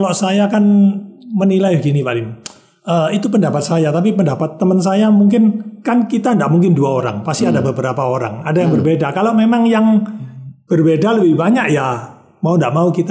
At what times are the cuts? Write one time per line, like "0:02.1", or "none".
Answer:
none